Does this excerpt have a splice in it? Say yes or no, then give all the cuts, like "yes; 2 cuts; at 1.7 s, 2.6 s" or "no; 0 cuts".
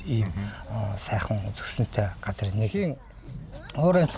yes; 1 cut; at 2.7 s